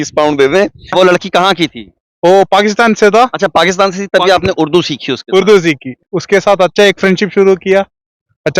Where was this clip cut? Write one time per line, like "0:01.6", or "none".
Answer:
0:00.9
0:06.0